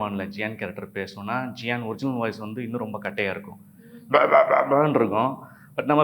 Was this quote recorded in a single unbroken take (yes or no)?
yes